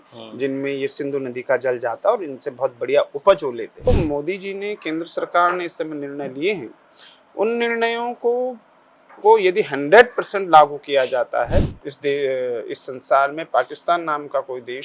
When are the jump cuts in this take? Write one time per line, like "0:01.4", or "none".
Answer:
0:03.9
0:11.8